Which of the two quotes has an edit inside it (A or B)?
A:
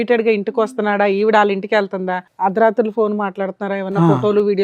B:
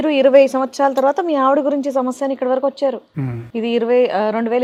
A